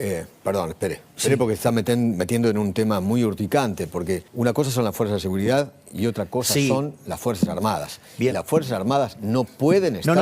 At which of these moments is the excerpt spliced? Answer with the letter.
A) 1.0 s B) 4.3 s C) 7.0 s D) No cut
B